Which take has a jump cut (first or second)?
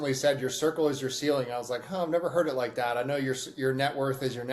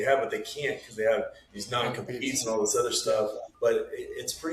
second